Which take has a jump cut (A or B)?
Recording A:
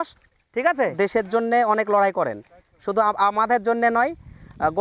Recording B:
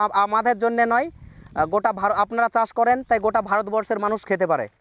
A